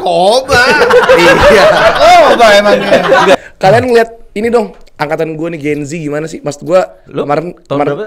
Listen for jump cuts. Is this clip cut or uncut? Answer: cut